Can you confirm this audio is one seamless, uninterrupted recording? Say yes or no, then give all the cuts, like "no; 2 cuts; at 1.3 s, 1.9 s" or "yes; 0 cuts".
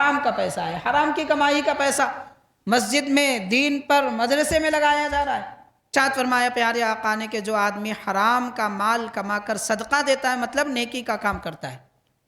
no; 1 cut; at 5.9 s